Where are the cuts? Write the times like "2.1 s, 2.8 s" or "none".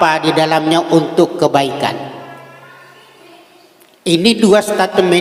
none